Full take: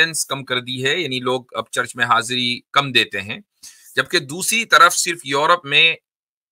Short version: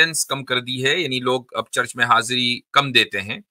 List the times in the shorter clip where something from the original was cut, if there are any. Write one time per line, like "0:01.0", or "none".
none